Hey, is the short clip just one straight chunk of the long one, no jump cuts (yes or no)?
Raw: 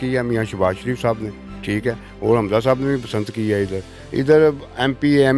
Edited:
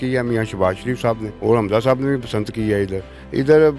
no